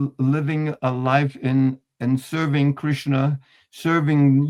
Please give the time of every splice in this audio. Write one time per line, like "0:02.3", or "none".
none